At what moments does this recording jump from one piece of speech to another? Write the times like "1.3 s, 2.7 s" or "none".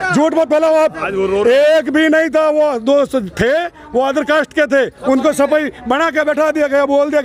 none